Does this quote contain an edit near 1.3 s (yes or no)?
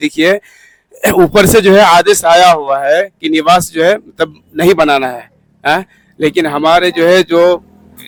no